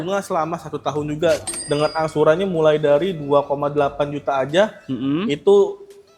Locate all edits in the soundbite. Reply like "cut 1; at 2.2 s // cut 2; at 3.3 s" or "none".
cut 1; at 1.5 s